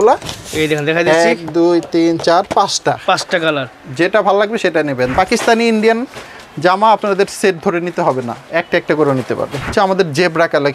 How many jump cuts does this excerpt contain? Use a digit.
2